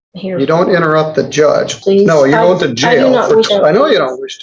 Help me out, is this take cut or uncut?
cut